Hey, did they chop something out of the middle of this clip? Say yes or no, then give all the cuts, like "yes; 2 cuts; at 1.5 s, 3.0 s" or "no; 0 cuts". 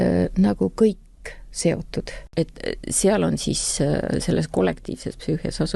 yes; 1 cut; at 2.3 s